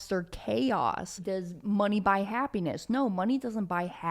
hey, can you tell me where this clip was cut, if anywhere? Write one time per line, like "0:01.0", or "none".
0:01.1